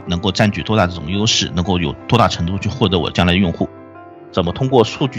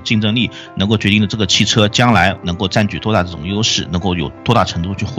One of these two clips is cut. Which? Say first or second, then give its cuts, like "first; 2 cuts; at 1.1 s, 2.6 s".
first; 1 cut; at 4.0 s